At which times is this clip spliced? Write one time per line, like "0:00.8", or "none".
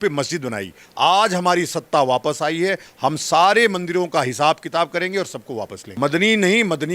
0:05.8